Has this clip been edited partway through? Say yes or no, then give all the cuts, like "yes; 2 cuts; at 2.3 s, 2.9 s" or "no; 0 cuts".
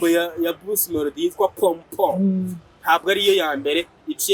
no; 0 cuts